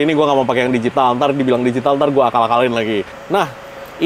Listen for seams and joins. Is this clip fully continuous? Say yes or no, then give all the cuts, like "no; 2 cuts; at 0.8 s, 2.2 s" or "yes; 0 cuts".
yes; 0 cuts